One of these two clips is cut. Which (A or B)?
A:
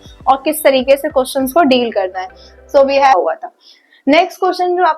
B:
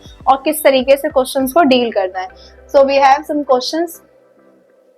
A